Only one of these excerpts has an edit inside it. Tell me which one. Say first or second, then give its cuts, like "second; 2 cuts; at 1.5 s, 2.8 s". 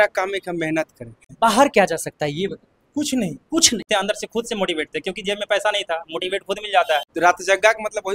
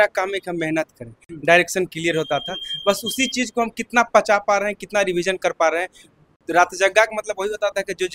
first; 3 cuts; at 1.3 s, 3.9 s, 7.1 s